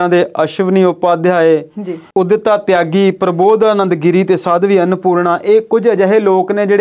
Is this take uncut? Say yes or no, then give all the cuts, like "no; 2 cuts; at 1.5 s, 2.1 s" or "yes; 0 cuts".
yes; 0 cuts